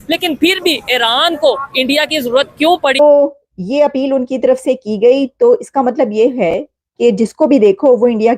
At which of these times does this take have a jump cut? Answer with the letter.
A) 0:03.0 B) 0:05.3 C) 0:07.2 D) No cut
A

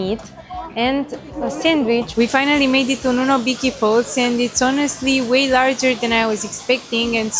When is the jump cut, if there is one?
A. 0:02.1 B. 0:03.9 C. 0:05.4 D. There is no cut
A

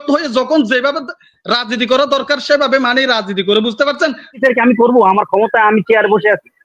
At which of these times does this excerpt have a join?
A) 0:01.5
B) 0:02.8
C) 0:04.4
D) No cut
C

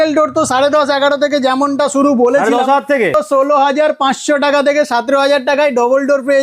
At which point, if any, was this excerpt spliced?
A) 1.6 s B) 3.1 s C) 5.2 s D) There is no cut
B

